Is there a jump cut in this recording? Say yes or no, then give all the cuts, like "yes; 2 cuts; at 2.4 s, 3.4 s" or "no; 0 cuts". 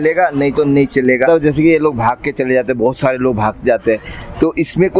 yes; 1 cut; at 1.3 s